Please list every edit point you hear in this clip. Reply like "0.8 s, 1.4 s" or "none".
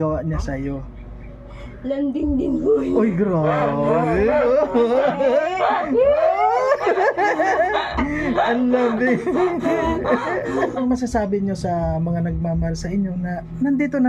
10.8 s